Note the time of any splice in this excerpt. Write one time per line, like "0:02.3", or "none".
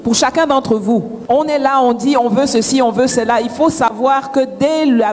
0:01.1